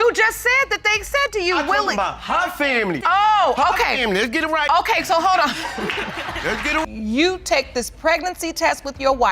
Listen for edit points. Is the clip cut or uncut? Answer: cut